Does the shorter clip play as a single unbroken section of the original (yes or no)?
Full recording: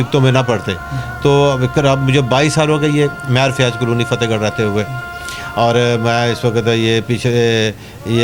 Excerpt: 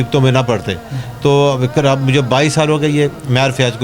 yes